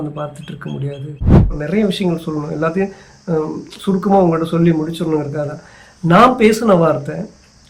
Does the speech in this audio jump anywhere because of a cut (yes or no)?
yes